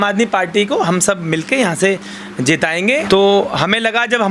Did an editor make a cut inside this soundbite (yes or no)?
yes